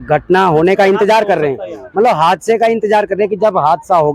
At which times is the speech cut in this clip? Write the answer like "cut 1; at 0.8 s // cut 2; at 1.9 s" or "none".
none